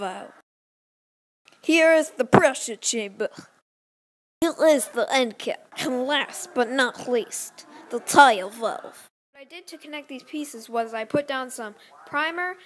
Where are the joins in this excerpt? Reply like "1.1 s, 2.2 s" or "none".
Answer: 9.1 s

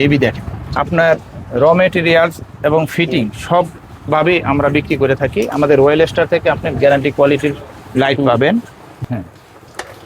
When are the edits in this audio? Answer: 0.7 s, 8.9 s

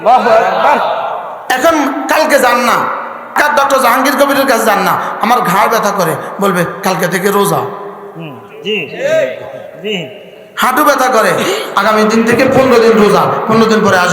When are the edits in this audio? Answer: 3.4 s

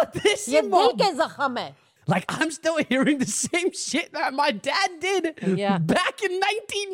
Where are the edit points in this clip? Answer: 1.9 s

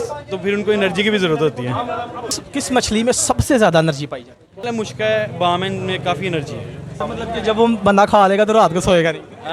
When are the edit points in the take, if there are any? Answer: 2.4 s, 4.6 s, 7.0 s

